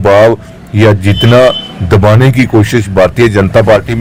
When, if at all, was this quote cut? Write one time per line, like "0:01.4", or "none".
none